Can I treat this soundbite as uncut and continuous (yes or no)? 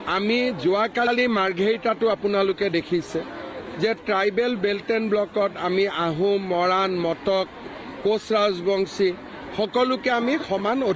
yes